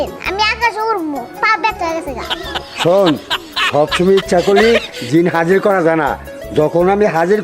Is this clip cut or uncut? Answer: uncut